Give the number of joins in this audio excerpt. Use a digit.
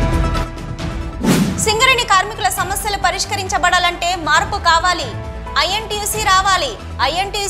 0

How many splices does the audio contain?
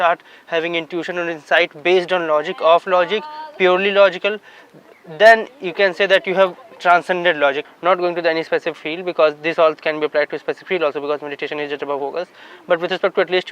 1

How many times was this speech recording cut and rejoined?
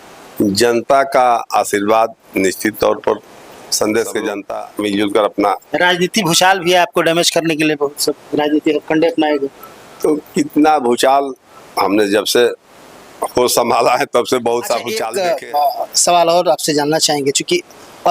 2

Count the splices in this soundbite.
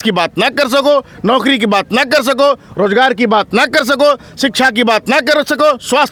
0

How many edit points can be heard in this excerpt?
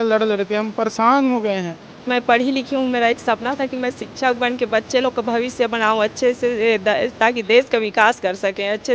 1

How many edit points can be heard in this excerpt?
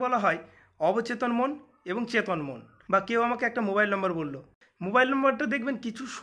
2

